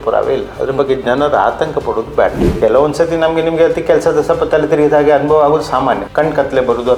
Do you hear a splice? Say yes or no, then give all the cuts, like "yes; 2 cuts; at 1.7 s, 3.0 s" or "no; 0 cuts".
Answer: yes; 2 cuts; at 2.4 s, 6.0 s